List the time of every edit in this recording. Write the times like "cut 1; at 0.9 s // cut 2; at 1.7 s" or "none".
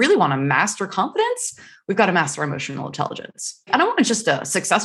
cut 1; at 3.7 s